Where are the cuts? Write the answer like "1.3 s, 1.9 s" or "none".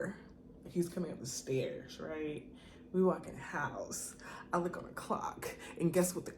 none

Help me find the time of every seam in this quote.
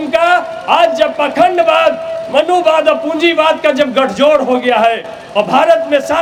none

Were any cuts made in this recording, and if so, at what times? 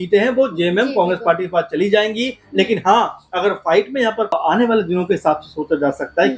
4.3 s

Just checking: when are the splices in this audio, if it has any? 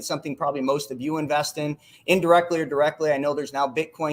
none

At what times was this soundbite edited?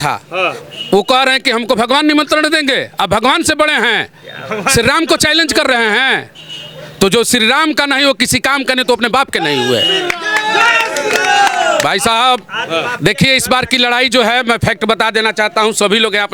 none

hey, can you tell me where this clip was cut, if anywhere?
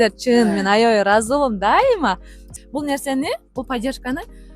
2.5 s

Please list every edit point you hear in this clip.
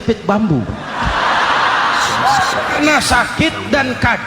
2.8 s

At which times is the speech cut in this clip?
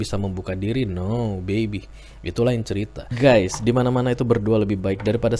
3.0 s

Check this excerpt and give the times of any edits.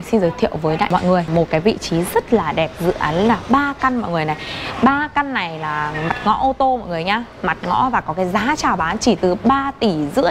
0.9 s

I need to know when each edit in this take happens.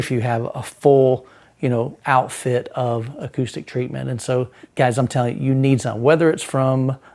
4.6 s

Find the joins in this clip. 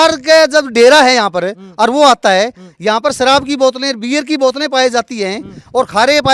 none

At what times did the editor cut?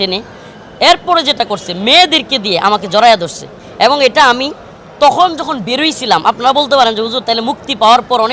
none

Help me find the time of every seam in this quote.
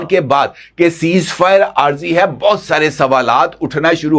none

